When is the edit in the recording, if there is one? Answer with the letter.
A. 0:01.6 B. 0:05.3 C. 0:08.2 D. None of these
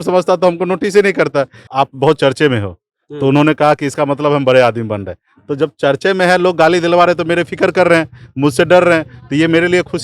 A